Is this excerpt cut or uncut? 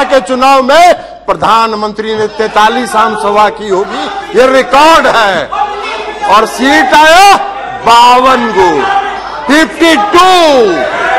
uncut